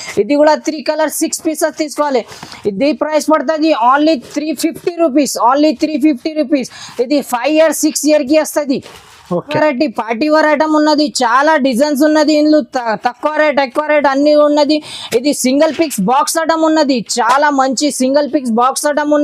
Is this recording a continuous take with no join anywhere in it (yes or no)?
yes